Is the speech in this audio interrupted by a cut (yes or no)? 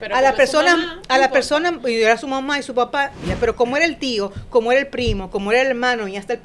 yes